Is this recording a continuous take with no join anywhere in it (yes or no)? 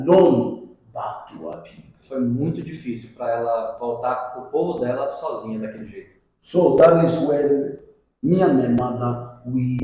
yes